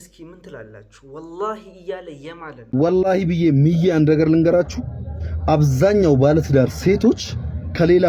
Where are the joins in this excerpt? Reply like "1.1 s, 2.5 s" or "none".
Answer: 2.0 s